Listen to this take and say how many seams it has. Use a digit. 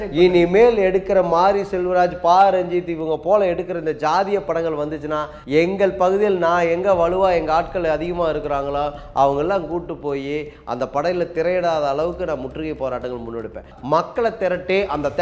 1